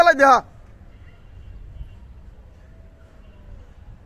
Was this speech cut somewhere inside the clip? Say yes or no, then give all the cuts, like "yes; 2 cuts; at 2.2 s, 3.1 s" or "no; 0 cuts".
no; 0 cuts